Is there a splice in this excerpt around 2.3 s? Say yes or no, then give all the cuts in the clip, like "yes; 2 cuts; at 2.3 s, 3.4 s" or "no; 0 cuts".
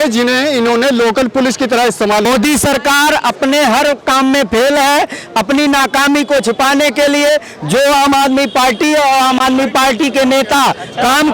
yes; 1 cut; at 2.3 s